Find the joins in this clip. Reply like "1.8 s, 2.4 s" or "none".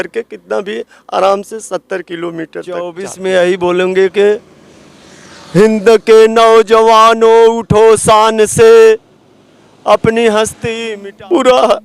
3.1 s, 10.7 s